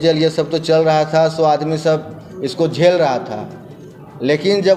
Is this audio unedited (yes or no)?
yes